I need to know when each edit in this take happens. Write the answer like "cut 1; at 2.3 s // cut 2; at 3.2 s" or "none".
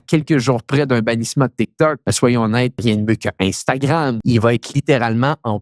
cut 1; at 2.1 s // cut 2; at 2.8 s // cut 3; at 4.2 s